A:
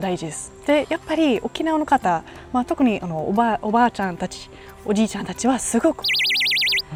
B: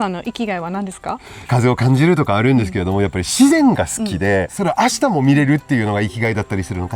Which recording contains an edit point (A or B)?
B